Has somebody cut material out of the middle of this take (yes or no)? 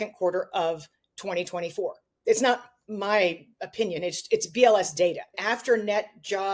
yes